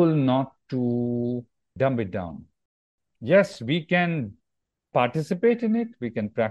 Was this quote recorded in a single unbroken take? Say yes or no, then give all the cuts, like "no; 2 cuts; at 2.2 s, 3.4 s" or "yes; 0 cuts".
no; 3 cuts; at 1.7 s, 3.1 s, 4.9 s